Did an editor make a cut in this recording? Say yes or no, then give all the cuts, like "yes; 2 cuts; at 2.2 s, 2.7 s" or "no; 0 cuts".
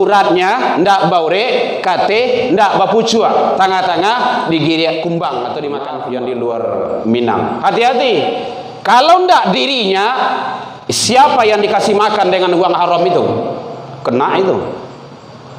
yes; 1 cut; at 5.9 s